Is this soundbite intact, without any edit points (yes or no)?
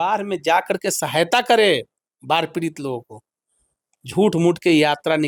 yes